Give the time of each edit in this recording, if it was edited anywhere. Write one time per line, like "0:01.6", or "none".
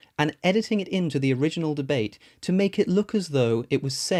none